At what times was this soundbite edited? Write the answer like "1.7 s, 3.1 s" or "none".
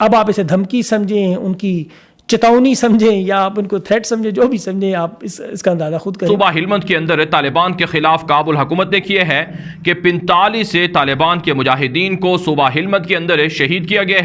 6.2 s